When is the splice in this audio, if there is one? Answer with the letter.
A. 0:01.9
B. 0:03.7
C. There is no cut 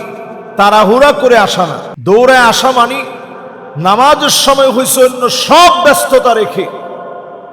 A